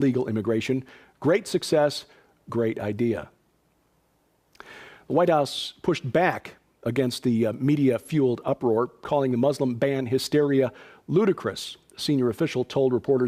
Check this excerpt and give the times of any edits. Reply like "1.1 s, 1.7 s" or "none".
7.3 s